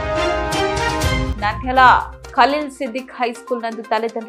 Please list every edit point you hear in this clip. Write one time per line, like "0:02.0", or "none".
none